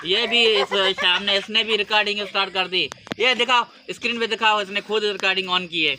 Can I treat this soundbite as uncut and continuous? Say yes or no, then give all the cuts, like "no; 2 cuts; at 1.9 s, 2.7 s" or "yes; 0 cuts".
yes; 0 cuts